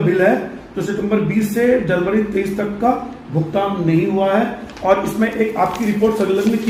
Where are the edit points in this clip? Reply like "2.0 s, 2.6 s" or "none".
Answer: none